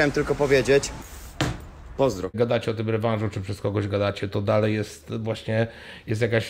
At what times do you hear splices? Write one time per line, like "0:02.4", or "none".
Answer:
0:02.3